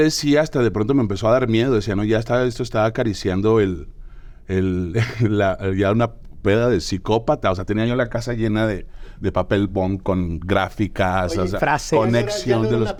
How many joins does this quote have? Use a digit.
0